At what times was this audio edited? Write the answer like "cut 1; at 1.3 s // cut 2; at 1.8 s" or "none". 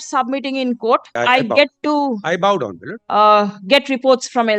cut 1; at 1.2 s